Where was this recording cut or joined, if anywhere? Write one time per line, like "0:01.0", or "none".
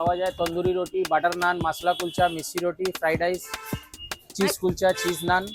none